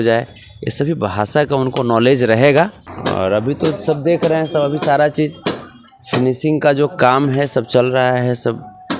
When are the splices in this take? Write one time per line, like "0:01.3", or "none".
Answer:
0:02.9